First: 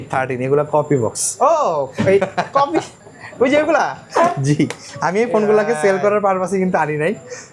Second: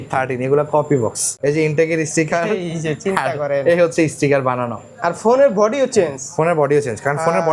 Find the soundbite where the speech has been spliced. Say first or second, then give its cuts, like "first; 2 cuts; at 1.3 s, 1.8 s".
second; 1 cut; at 1.3 s